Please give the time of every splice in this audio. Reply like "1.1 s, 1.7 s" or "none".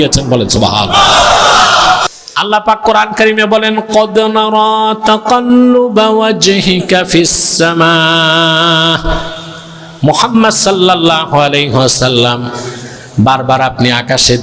2.0 s